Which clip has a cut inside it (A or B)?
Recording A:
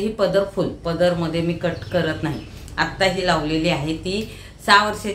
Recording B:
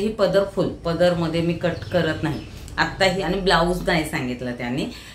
B